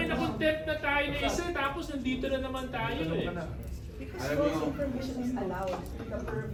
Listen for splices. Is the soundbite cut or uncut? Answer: uncut